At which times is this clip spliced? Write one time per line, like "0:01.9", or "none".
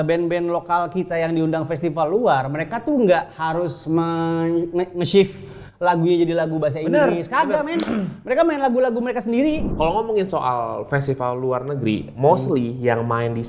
0:09.7